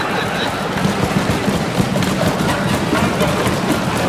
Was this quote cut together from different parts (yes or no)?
no